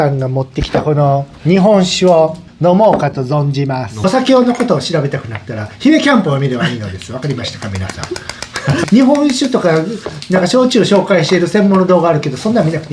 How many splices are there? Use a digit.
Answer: 2